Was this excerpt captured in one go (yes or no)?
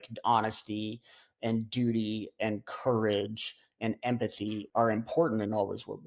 no